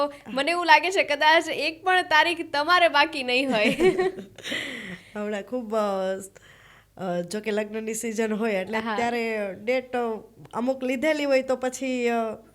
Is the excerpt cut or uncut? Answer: uncut